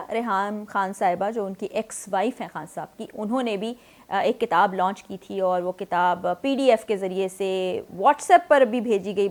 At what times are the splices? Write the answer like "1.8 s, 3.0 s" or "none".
none